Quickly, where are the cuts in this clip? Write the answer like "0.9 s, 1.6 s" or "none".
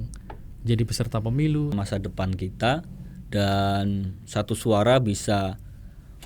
1.7 s